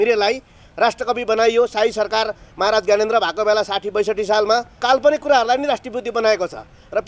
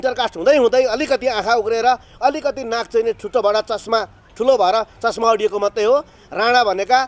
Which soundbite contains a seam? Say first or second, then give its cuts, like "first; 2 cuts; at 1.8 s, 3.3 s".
first; 1 cut; at 4.8 s